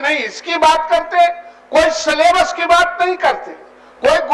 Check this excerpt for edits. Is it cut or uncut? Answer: uncut